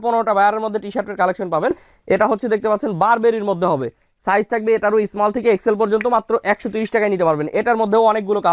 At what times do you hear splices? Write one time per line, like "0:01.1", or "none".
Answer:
none